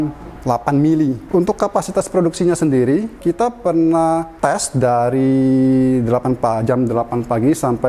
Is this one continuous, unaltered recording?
no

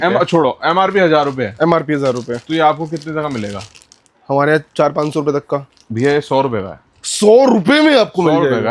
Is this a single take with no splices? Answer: yes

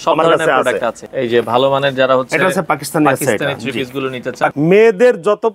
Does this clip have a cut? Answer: yes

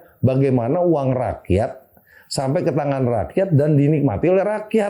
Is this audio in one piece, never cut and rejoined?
yes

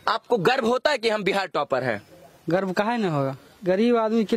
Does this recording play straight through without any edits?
no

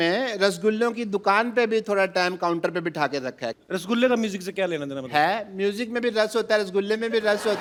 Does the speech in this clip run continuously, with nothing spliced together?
yes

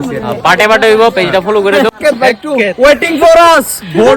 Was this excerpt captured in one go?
no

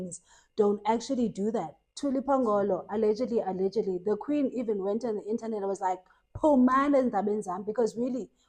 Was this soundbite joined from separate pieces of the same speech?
yes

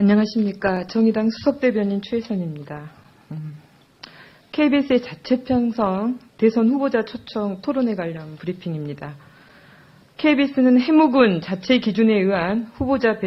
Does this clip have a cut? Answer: no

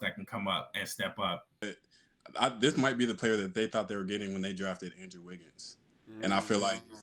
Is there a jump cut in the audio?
yes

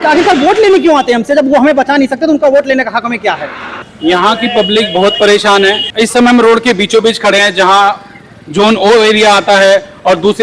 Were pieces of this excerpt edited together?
no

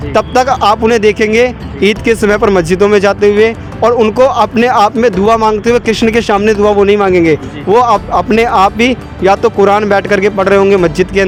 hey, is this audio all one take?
yes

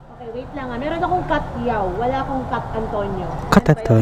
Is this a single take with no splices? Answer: yes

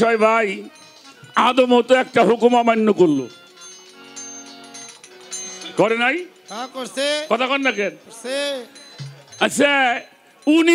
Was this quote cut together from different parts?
no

